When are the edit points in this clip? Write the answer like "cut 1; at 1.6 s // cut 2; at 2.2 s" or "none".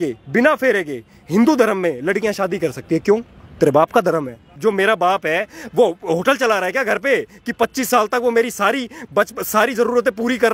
cut 1; at 4.5 s